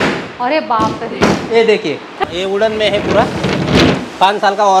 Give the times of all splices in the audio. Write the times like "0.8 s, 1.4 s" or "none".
2.2 s